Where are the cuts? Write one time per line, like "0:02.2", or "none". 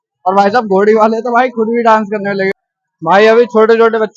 0:02.6